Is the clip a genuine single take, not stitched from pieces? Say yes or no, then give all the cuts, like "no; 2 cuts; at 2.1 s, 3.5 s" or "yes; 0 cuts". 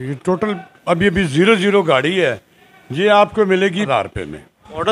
no; 1 cut; at 3.9 s